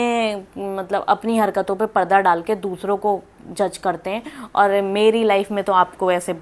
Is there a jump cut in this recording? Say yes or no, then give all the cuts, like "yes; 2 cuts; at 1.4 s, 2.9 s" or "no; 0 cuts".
no; 0 cuts